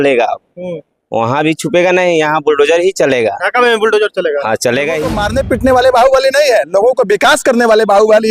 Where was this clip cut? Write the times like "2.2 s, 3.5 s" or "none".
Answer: 5.2 s